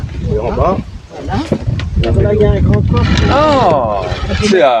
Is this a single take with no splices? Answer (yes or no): yes